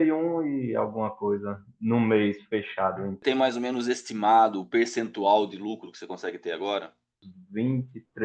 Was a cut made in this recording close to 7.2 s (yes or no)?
yes